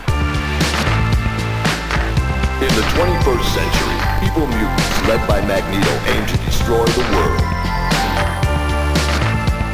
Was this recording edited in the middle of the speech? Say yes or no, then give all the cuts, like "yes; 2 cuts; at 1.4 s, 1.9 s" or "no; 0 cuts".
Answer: no; 0 cuts